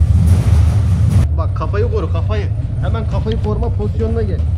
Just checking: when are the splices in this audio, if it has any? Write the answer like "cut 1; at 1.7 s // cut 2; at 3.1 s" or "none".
cut 1; at 1.2 s